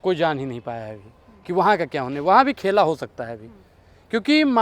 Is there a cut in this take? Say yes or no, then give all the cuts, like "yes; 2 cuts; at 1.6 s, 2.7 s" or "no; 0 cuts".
no; 0 cuts